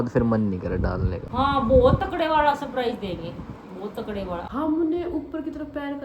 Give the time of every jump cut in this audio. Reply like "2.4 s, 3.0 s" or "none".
1.2 s, 4.5 s